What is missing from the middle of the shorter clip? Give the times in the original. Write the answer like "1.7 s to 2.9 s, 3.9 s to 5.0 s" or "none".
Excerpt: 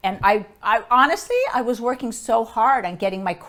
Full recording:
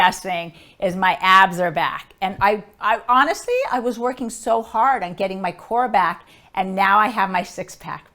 none